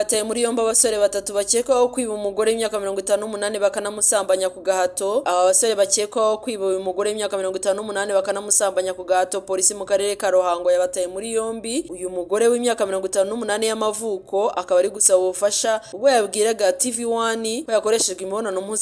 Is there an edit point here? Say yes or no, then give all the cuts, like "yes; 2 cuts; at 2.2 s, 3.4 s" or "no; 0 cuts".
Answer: no; 0 cuts